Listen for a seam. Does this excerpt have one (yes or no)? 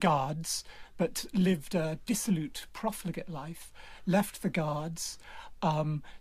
no